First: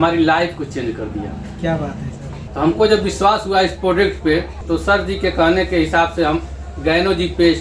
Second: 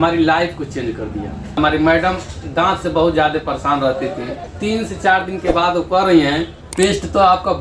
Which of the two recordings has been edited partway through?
second; 2 cuts; at 1.6 s, 4.5 s

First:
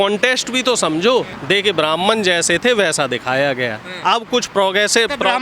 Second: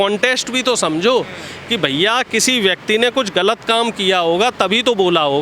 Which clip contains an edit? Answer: first; 1 cut; at 1.3 s

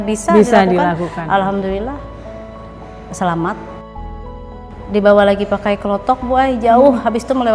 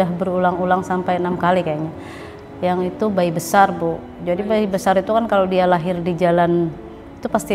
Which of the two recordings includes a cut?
first; 1 cut; at 4.3 s

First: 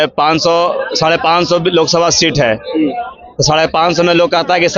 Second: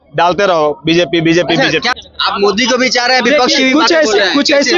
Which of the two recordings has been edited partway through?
second; 1 cut; at 1.9 s

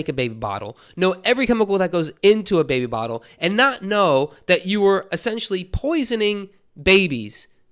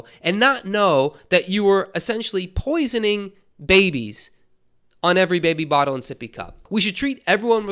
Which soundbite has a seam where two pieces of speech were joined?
second; 1 cut; at 6.6 s

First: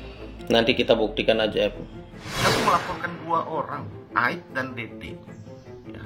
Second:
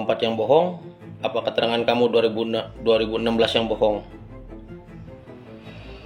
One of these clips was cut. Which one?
first; 1 cut; at 2.1 s

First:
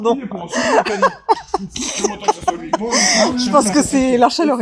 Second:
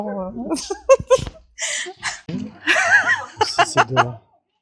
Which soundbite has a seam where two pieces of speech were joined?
second; 1 cut; at 2.2 s

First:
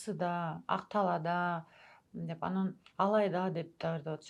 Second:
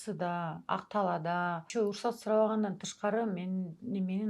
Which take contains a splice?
second; 1 cut; at 1.6 s

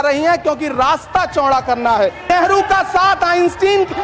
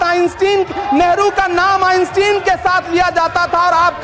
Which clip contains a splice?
first; 1 cut; at 2.3 s

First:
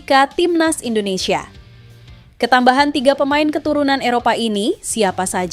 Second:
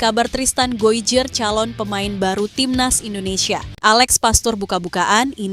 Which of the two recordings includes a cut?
second; 1 cut; at 3.7 s

